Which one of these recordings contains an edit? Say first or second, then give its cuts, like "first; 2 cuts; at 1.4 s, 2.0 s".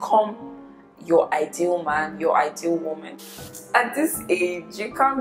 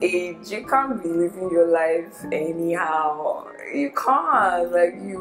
first; 1 cut; at 3.0 s